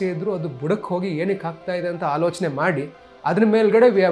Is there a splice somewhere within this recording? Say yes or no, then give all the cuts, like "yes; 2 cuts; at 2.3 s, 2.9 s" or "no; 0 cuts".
no; 0 cuts